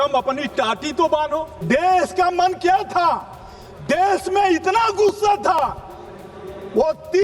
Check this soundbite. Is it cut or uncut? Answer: cut